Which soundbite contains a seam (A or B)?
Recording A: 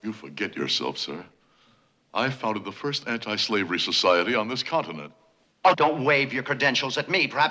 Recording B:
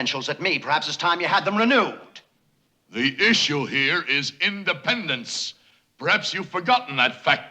B